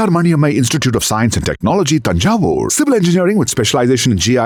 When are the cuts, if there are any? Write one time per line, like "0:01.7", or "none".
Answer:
none